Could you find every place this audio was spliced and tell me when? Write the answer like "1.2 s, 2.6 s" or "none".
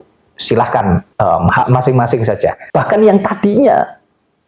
1.1 s, 2.6 s

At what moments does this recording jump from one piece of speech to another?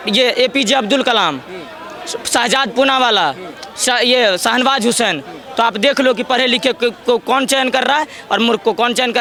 none

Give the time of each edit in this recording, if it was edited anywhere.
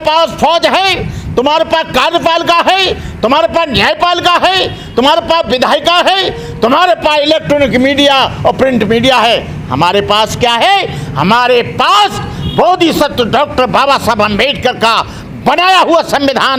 none

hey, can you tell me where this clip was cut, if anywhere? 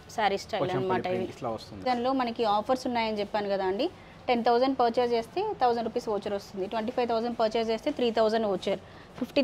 1.8 s

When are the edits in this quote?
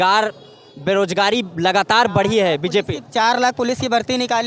none

